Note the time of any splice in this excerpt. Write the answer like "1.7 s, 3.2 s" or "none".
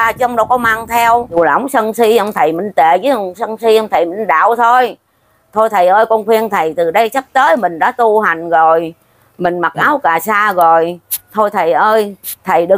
1.4 s